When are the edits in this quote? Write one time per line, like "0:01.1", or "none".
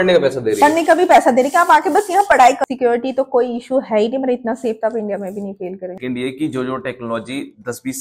0:02.6
0:06.0